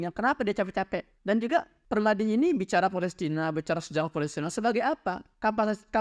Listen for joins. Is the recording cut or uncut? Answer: uncut